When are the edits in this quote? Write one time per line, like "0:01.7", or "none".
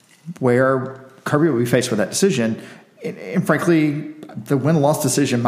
none